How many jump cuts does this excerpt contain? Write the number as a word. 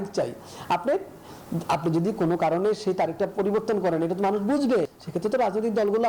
one